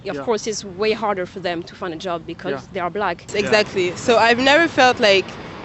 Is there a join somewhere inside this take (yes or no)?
yes